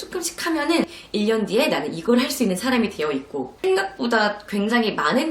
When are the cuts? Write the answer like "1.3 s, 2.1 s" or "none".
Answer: 0.9 s, 3.5 s